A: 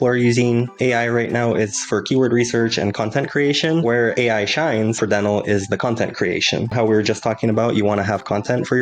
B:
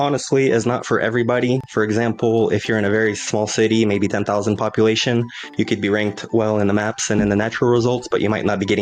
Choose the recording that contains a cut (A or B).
A